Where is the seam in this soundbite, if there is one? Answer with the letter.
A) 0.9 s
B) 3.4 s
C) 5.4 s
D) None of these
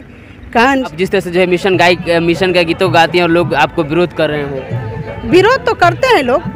A